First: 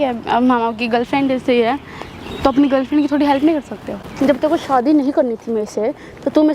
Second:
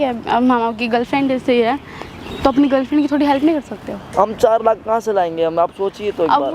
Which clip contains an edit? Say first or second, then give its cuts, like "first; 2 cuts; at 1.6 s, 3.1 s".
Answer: first; 1 cut; at 4.0 s